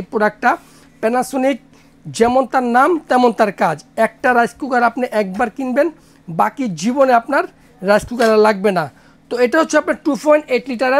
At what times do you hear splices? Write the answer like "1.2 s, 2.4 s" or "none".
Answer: none